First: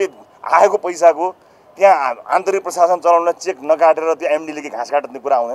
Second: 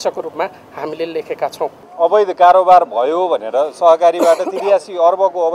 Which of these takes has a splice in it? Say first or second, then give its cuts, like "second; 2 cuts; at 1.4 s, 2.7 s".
second; 1 cut; at 1.8 s